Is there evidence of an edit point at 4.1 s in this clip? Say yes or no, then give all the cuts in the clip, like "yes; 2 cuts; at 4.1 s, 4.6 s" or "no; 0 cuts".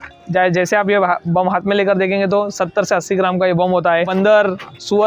yes; 1 cut; at 4.1 s